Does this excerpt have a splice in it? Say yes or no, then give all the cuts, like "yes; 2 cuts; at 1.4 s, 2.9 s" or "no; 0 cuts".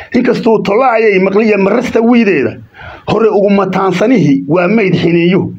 no; 0 cuts